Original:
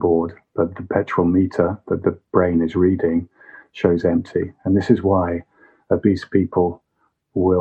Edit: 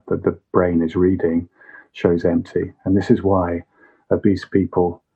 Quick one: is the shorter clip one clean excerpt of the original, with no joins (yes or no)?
yes